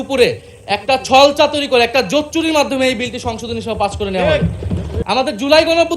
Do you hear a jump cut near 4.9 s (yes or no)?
yes